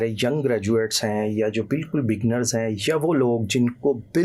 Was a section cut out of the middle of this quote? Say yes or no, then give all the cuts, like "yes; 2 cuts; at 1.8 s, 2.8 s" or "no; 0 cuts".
no; 0 cuts